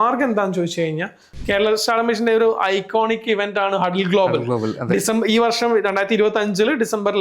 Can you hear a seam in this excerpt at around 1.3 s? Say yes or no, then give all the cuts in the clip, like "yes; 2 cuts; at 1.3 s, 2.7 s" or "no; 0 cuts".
yes; 1 cut; at 1.3 s